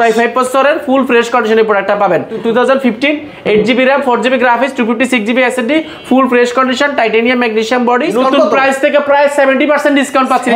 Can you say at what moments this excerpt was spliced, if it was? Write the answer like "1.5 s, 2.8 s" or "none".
2.4 s, 8.1 s